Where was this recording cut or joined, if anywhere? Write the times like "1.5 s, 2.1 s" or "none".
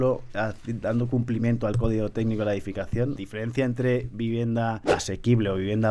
3.2 s, 4.8 s

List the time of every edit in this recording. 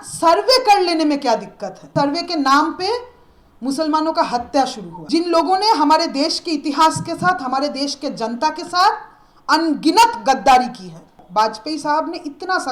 1.9 s, 4.9 s, 11.1 s

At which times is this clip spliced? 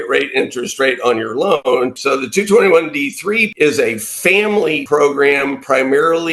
1.7 s, 3.5 s, 4.8 s

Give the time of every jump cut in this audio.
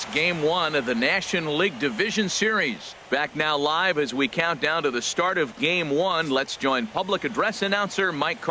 2.9 s

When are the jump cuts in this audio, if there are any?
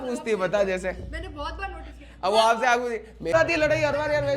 3.3 s

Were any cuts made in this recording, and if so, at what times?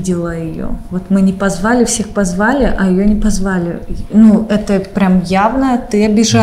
none

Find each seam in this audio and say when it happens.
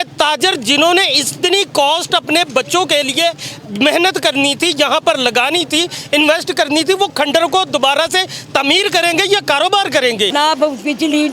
10.3 s

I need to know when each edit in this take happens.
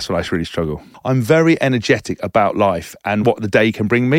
0.9 s, 3.2 s

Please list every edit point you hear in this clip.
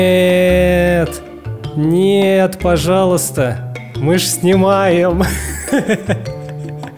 none

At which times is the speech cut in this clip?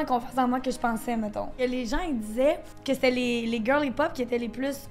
1.5 s, 2.7 s

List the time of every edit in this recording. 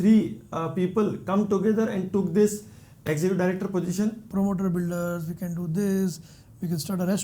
4.2 s

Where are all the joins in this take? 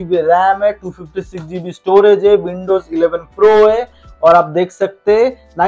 none

